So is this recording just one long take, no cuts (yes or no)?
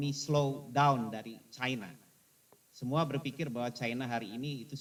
yes